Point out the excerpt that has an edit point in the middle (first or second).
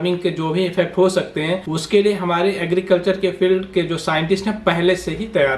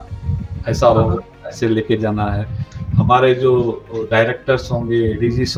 first